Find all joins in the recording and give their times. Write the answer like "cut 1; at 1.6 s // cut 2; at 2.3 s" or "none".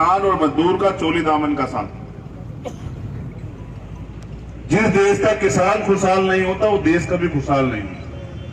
none